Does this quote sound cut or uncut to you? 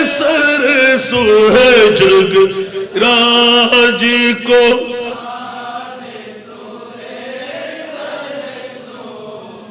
uncut